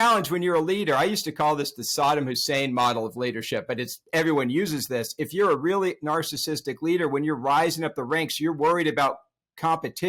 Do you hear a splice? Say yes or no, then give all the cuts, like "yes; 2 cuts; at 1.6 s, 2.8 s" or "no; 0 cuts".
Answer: no; 0 cuts